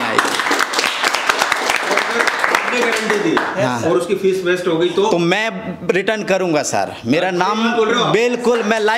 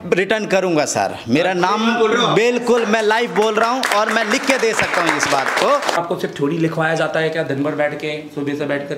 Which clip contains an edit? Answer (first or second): second